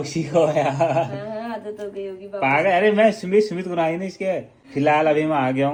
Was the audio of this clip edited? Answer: no; 0 cuts

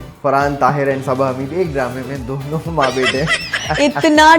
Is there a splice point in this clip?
no; 0 cuts

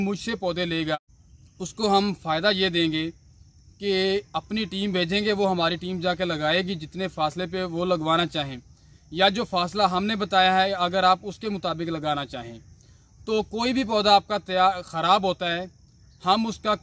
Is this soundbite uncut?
no; 1 cut; at 0.9 s

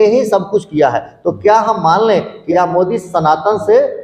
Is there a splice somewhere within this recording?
yes; 1 cut; at 2.4 s

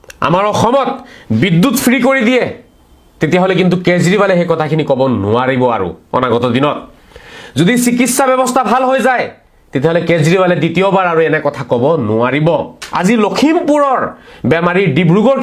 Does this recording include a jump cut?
yes; 1 cut; at 12.8 s

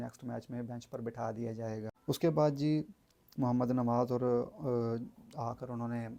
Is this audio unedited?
yes; 0 cuts

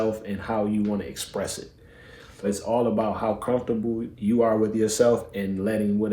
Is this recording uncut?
no; 2 cuts; at 2.4 s, 4.1 s

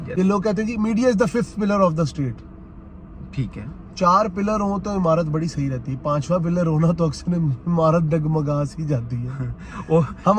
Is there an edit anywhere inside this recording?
no; 0 cuts

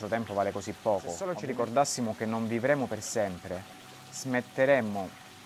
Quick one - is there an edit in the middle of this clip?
yes; 1 cut; at 1.3 s

